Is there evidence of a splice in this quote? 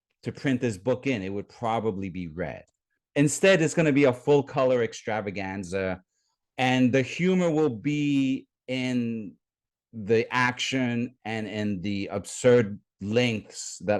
yes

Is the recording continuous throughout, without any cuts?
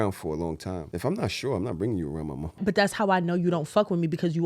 no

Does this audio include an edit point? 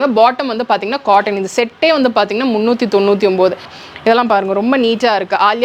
yes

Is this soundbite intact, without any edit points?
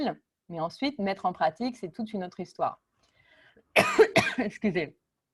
yes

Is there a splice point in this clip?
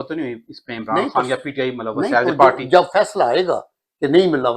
no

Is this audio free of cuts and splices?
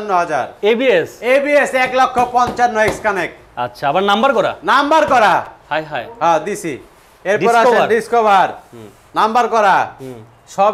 yes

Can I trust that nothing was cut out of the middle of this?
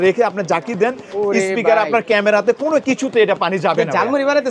yes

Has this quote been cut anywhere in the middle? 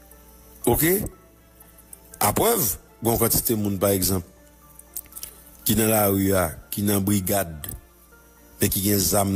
no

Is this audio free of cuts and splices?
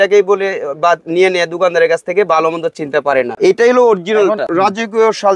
no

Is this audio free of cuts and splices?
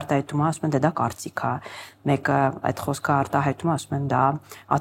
yes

